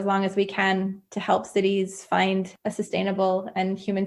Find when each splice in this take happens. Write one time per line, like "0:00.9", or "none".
0:02.6